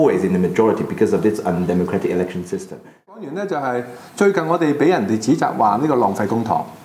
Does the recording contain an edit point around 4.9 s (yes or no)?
no